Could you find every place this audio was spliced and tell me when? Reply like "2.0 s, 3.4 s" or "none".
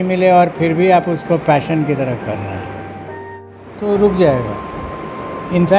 3.2 s